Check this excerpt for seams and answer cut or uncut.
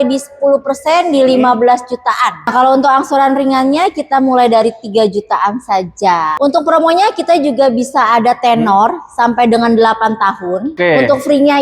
cut